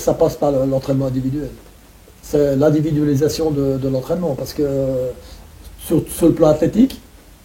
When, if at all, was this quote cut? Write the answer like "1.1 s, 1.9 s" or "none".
none